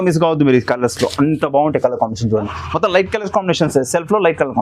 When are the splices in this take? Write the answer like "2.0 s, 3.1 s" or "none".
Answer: 2.6 s

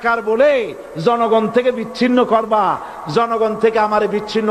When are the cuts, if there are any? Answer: none

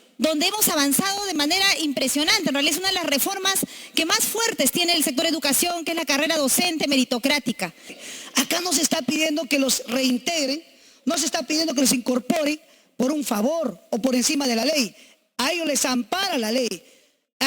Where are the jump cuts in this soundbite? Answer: 7.9 s

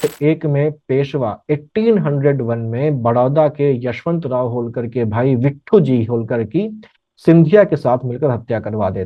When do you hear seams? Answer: none

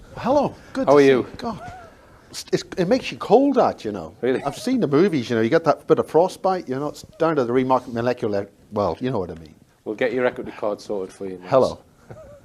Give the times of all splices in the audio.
6.4 s

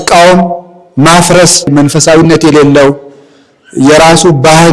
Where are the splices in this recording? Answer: 1.7 s

